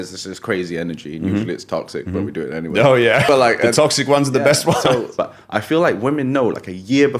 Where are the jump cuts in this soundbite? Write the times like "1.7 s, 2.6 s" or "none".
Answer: 3.2 s, 5.1 s

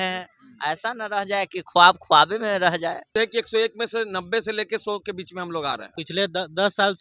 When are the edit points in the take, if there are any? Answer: 3.1 s, 5.9 s

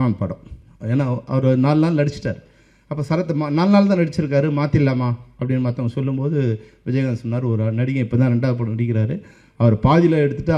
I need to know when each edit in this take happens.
none

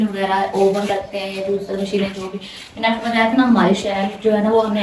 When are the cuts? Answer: none

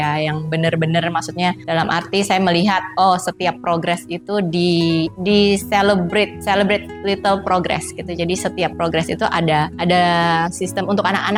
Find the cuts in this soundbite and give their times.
none

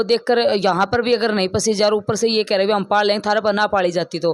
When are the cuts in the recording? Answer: none

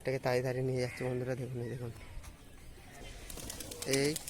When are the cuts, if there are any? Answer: 3.1 s

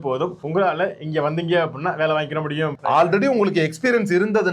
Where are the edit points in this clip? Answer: 2.8 s

